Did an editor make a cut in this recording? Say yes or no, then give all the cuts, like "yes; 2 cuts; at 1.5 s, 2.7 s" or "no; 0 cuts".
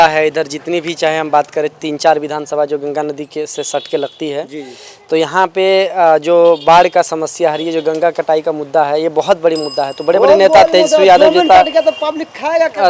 no; 0 cuts